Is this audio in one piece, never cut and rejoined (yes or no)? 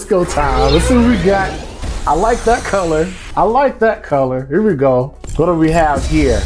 no